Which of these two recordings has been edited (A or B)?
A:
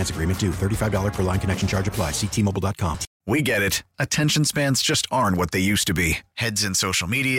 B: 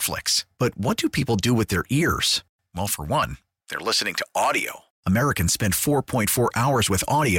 A